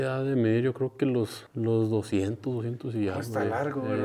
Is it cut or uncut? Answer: cut